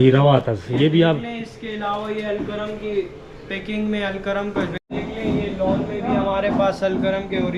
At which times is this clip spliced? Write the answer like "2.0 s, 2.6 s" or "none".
4.8 s